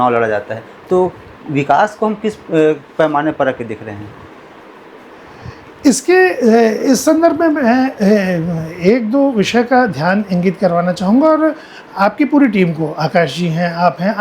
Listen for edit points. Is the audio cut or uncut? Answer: uncut